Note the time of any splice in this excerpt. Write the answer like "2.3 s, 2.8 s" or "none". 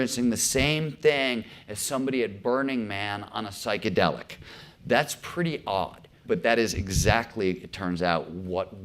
6.2 s